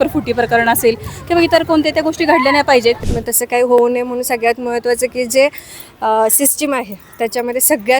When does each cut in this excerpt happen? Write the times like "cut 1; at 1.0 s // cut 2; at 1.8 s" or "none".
cut 1; at 3.1 s